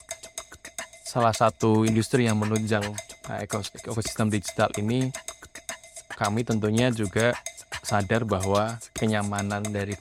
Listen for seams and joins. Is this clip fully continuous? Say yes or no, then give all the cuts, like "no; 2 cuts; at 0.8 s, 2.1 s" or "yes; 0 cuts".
yes; 0 cuts